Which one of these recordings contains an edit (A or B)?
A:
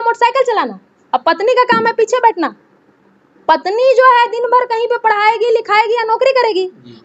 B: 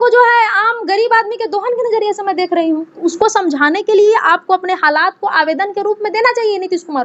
B